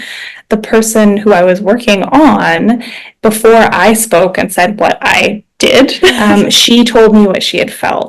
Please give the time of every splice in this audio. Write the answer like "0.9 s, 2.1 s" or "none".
6.2 s